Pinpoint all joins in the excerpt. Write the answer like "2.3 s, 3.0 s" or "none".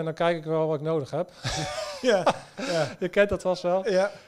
none